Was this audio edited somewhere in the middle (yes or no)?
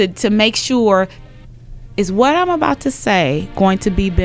yes